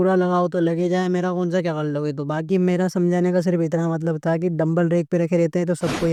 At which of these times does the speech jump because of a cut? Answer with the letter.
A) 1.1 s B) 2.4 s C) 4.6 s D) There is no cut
D